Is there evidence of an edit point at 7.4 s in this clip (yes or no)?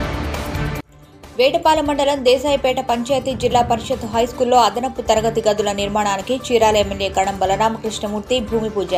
no